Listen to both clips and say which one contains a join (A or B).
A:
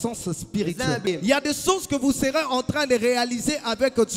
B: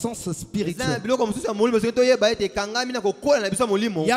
A